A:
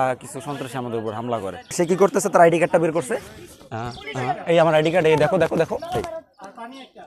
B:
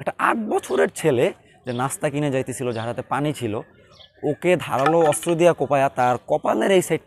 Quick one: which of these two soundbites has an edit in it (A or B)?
A